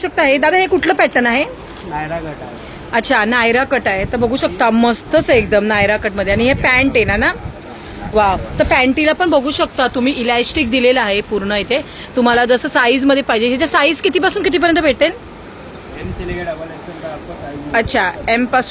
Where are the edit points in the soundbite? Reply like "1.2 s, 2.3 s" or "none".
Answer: none